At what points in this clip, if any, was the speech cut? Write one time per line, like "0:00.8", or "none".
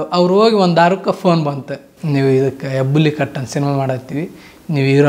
none